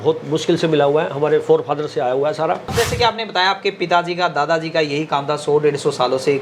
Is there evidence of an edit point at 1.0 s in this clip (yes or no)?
no